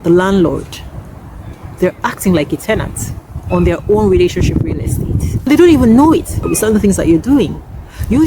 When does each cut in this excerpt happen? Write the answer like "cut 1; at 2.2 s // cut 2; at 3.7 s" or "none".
cut 1; at 5.5 s // cut 2; at 6.4 s